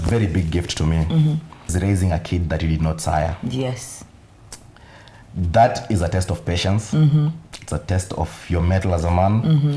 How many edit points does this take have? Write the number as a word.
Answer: one